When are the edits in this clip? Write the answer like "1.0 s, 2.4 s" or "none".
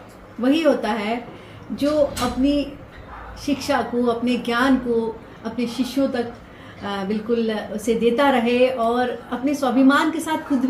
none